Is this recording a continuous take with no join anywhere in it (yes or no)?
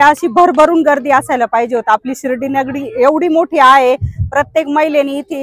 yes